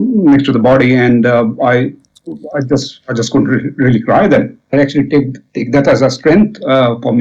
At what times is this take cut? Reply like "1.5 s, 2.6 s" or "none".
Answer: 4.7 s